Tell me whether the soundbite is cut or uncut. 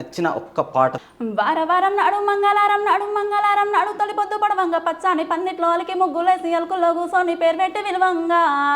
cut